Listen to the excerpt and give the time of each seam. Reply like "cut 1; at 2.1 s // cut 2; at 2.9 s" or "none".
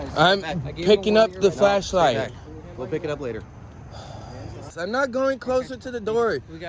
cut 1; at 4.7 s